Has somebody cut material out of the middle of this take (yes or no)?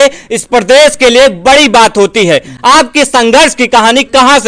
no